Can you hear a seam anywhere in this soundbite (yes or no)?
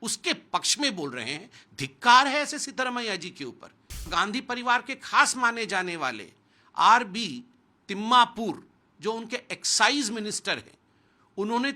yes